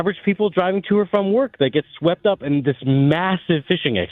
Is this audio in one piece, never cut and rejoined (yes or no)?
yes